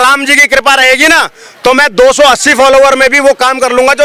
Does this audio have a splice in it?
no; 0 cuts

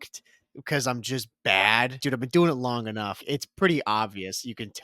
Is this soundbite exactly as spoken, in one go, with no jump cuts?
no; 2 cuts; at 2.0 s, 3.2 s

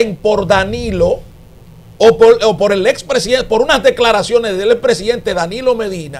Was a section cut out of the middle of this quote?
no; 0 cuts

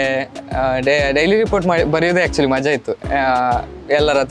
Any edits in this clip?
no; 0 cuts

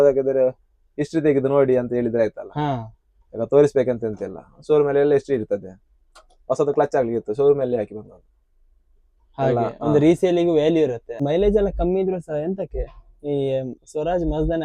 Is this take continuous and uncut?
no; 1 cut; at 11.0 s

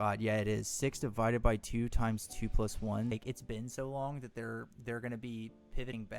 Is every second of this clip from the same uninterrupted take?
no; 1 cut; at 3.1 s

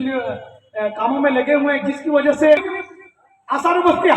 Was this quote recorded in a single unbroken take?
no; 1 cut; at 2.6 s

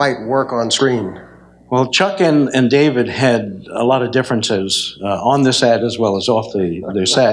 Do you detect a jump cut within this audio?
no; 0 cuts

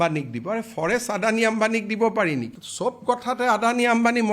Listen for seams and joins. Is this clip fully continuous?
no; 1 cut; at 2.6 s

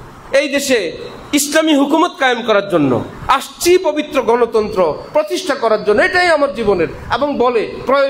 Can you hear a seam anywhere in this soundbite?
no; 0 cuts

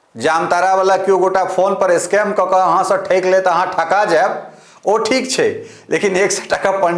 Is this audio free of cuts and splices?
yes; 0 cuts

